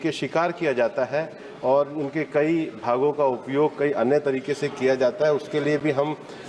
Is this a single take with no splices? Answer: yes; 0 cuts

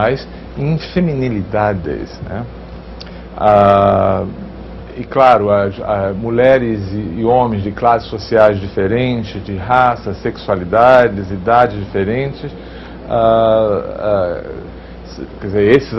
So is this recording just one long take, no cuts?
yes; 0 cuts

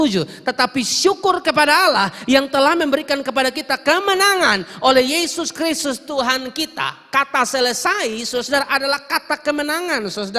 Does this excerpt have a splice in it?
no; 0 cuts

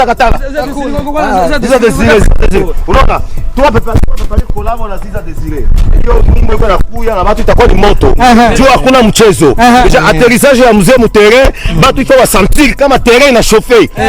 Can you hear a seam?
no; 0 cuts

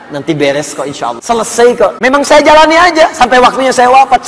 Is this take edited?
yes; 2 cuts; at 1.2 s, 2.0 s

